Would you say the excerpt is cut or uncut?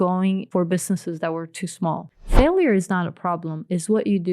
cut